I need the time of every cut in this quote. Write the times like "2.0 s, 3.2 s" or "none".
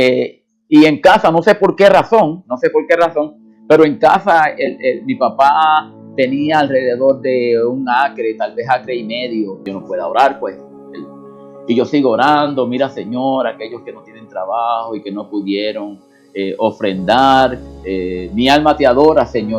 9.6 s